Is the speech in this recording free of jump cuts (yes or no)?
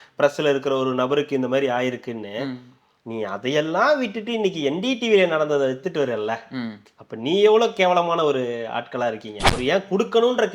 no